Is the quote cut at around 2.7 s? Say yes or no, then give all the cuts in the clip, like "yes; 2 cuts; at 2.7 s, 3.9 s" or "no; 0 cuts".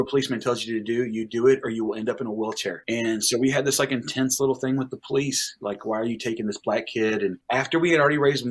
yes; 2 cuts; at 2.7 s, 7.4 s